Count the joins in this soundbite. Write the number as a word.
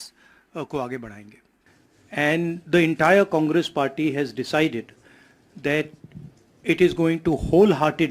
zero